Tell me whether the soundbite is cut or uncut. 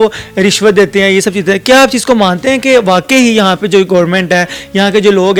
uncut